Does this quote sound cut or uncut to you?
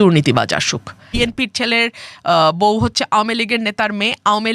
cut